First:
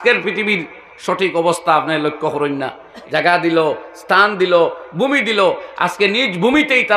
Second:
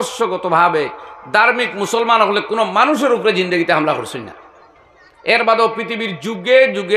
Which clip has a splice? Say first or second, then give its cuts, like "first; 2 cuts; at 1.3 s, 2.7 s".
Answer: first; 1 cut; at 2.9 s